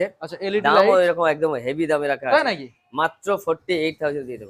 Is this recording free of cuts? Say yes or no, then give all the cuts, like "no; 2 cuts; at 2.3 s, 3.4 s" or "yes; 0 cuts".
yes; 0 cuts